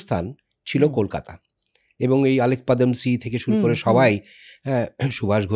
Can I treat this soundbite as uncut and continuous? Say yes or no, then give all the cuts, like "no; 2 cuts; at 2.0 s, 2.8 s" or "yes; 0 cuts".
yes; 0 cuts